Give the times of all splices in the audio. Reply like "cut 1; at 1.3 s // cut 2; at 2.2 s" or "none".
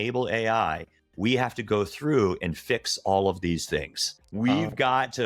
none